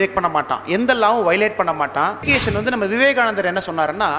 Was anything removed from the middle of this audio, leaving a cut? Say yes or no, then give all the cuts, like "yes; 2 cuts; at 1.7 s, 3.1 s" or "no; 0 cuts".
yes; 1 cut; at 2.3 s